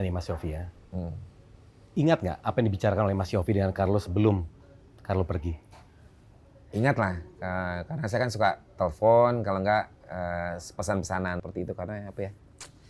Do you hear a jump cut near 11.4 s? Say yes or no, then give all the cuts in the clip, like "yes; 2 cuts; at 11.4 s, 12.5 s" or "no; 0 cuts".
yes; 1 cut; at 11.4 s